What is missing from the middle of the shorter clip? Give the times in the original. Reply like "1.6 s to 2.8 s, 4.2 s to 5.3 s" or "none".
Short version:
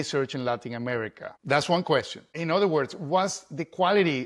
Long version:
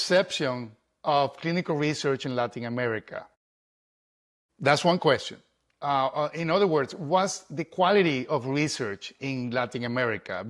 3.2 s to 4.4 s, 5.5 s to 6.4 s